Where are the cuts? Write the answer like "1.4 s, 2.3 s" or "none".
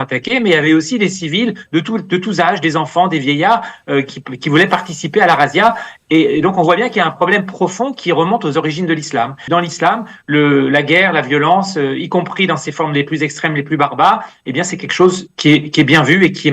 9.4 s